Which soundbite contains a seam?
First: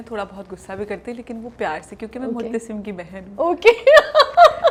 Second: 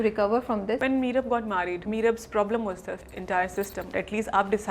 second; 4 cuts; at 0.8 s, 1.8 s, 3.1 s, 3.9 s

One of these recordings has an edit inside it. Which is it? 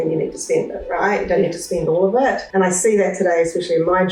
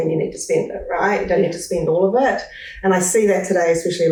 first; 1 cut; at 2.4 s

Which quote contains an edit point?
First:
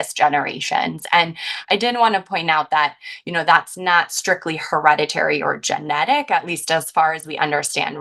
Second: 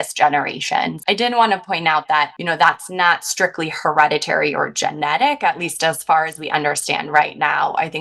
second; 2 cuts; at 1.0 s, 2.4 s

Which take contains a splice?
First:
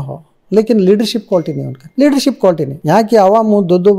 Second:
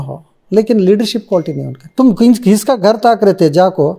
second; 1 cut; at 1.9 s

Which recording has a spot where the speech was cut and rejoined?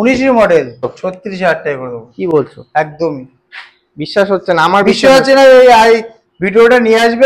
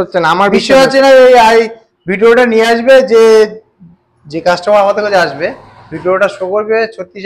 first; 1 cut; at 0.9 s

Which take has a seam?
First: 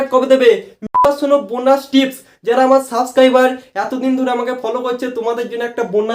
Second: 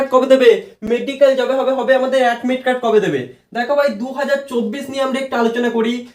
first; 1 cut; at 1.1 s

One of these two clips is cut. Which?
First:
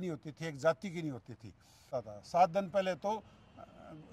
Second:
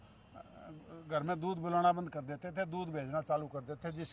first; 1 cut; at 1.9 s

